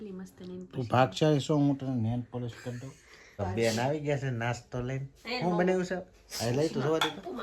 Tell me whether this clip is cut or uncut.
cut